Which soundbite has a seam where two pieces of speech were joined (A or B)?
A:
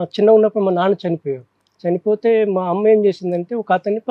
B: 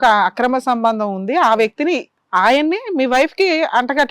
B